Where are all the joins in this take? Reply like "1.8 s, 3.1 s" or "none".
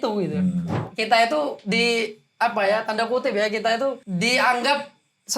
0.9 s, 4.0 s